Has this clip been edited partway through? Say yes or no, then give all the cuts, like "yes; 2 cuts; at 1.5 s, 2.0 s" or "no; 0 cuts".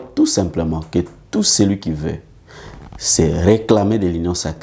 no; 0 cuts